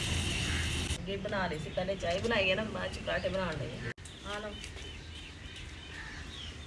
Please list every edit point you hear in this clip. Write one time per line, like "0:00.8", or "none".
0:00.9